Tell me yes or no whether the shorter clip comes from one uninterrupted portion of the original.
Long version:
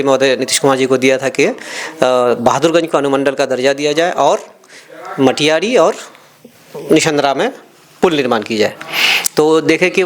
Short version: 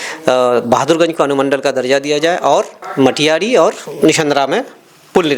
no